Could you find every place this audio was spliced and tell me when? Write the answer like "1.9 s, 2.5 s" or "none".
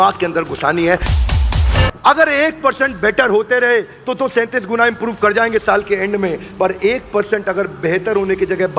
1.4 s